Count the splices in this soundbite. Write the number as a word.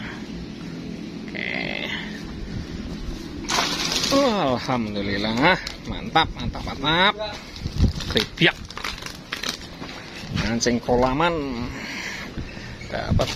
zero